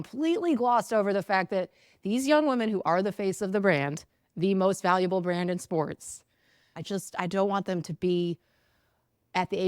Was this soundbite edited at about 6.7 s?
yes; 1 cut; at 6.7 s

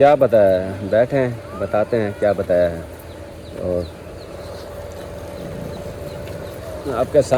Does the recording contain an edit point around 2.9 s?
no; 0 cuts

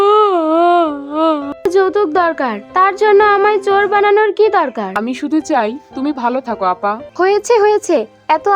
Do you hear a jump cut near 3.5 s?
no; 3 cuts; at 1.6 s, 5.0 s, 7.0 s

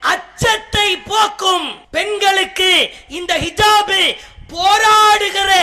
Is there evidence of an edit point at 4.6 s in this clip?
no; 1 cut; at 1.8 s

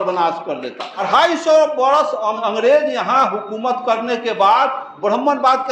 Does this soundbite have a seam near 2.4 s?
yes; 2 cuts; at 1.1 s, 2.4 s

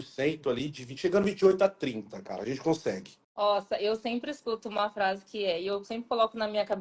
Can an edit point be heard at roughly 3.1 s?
yes; 1 cut; at 3.1 s

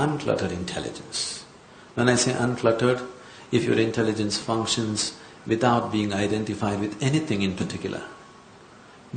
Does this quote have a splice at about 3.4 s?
no; 1 cut; at 6.5 s

